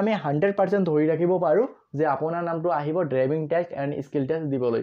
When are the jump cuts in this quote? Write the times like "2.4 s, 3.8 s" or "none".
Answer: none